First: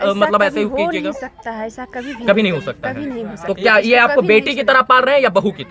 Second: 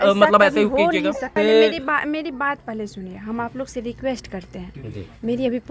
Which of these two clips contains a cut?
second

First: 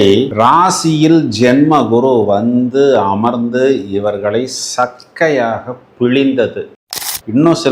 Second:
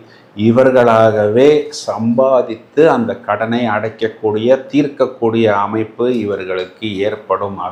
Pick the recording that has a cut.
first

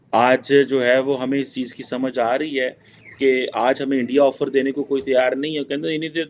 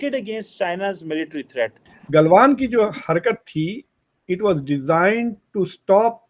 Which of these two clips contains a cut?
second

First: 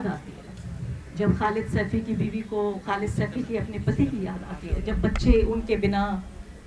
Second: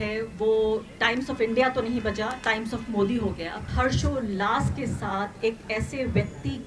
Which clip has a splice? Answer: second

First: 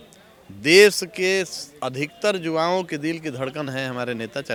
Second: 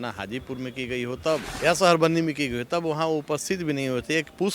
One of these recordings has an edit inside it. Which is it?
second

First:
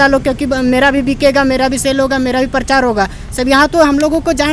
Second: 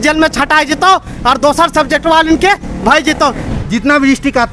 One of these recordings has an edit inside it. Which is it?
second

